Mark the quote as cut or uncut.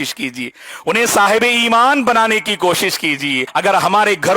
cut